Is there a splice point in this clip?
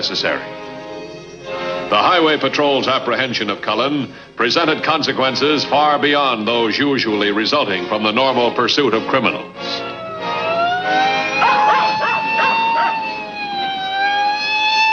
yes; 1 cut; at 5.0 s

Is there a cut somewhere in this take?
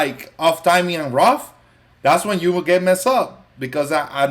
no; 0 cuts

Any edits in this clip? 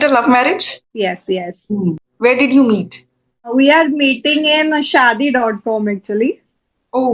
yes; 3 cuts; at 0.9 s, 2.0 s, 3.5 s

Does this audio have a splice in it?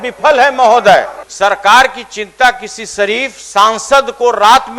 yes; 1 cut; at 1.2 s

